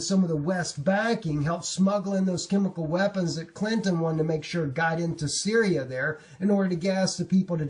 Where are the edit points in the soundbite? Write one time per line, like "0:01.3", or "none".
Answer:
0:04.1